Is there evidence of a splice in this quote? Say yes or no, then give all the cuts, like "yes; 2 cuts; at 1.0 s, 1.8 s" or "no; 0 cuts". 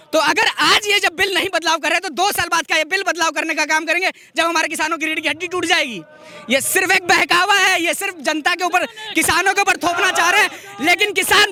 no; 0 cuts